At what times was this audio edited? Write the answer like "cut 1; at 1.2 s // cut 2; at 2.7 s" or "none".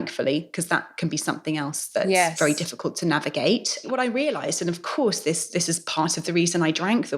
cut 1; at 3.6 s